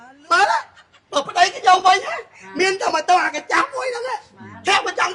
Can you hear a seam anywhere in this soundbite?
yes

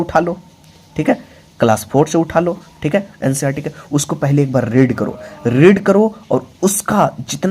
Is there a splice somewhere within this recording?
no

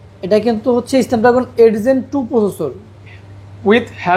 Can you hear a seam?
no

